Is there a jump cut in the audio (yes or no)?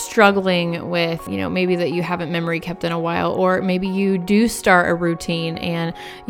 yes